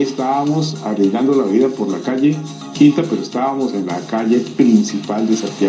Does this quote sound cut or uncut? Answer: uncut